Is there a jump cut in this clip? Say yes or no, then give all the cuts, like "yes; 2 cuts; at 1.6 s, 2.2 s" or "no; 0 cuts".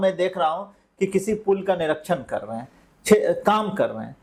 no; 0 cuts